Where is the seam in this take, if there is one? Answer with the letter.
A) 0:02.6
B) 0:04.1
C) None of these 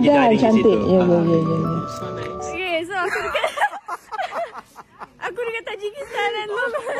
A